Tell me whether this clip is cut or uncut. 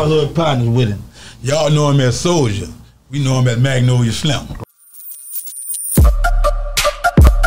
cut